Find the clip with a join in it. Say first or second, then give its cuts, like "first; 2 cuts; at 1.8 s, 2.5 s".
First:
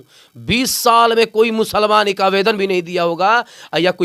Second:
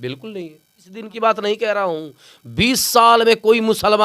second; 1 cut; at 1.1 s